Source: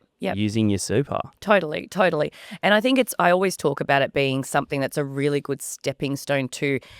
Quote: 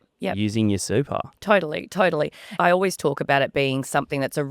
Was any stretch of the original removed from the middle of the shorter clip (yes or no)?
yes